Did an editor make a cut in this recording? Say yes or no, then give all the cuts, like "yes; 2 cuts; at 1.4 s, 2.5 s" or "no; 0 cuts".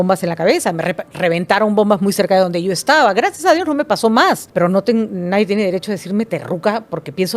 yes; 1 cut; at 4.5 s